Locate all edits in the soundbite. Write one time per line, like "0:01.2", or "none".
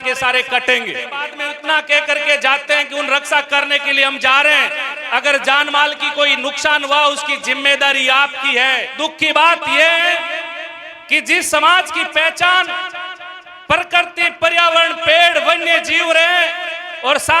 0:01.5
0:08.9

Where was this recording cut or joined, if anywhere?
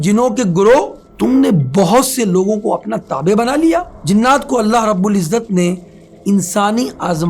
0:01.0
0:03.9

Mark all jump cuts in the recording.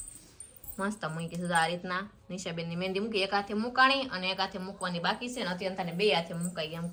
none

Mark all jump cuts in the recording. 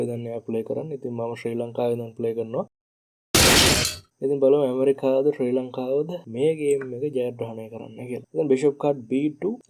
none

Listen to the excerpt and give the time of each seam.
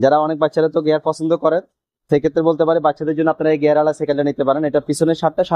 none

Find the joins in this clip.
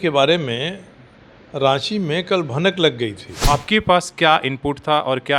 0:03.3

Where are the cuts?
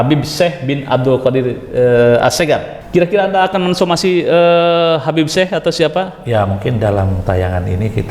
0:02.8

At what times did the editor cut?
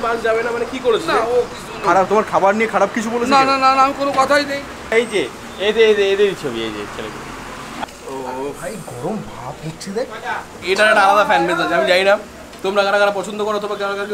0:01.8
0:04.9
0:07.7
0:10.6

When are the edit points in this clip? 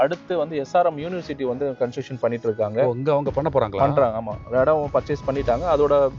none

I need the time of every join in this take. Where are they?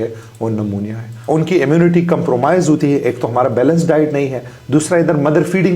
0:01.2

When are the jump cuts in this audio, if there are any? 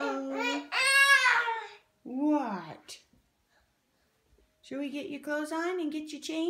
none

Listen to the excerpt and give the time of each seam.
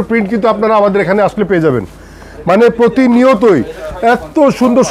none

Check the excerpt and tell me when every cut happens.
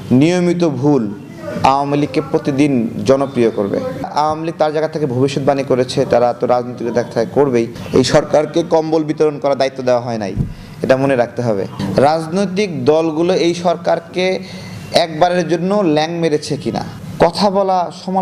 0:04.1
0:07.8
0:11.8
0:17.0

